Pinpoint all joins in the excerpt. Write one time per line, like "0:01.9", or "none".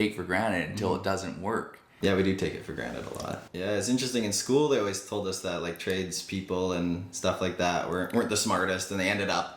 0:01.9
0:03.4